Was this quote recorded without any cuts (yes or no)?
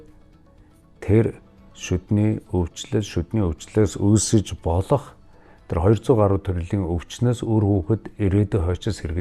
yes